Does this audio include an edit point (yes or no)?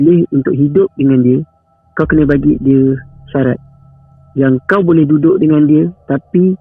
no